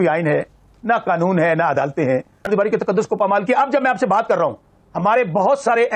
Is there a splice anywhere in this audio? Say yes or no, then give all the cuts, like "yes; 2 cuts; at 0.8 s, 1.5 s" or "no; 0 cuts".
yes; 1 cut; at 2.5 s